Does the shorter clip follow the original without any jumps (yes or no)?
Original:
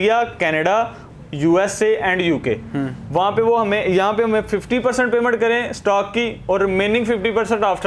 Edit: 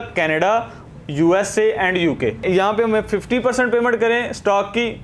no